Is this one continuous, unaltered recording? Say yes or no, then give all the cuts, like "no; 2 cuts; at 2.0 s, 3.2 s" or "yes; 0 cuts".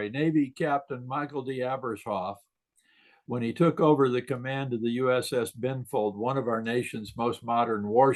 yes; 0 cuts